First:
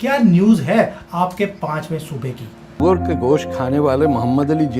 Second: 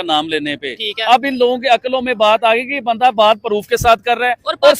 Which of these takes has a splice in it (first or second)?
first